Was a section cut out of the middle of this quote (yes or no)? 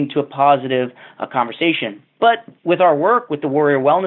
no